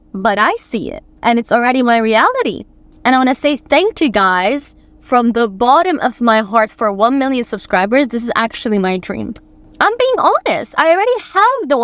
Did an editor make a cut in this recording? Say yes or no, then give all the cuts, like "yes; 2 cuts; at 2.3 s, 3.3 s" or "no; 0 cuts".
no; 0 cuts